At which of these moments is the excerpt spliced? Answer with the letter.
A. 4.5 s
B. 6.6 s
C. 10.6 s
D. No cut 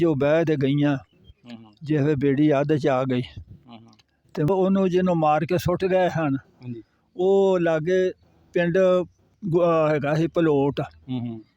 A